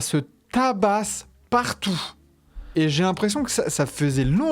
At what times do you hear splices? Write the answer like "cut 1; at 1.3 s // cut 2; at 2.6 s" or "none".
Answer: cut 1; at 2.7 s